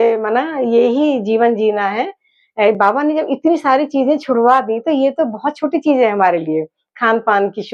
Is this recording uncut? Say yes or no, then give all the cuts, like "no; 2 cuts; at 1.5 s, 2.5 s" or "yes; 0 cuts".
yes; 0 cuts